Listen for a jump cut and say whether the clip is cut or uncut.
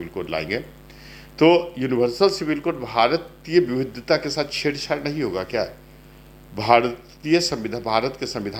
uncut